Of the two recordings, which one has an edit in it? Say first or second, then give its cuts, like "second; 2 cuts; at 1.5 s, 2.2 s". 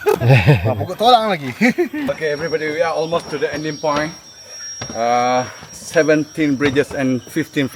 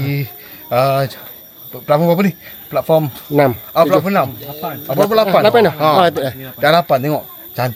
first; 1 cut; at 2.1 s